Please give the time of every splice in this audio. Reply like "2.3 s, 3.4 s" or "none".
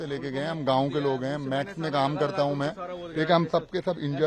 none